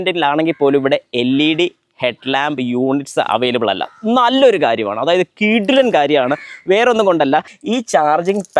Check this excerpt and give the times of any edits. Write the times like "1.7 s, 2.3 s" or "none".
7.5 s